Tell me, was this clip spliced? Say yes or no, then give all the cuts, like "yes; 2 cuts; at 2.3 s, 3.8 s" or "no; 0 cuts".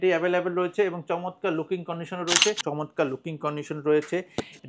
yes; 1 cut; at 2.6 s